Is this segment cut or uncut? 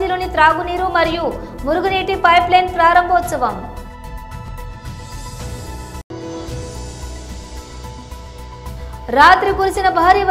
uncut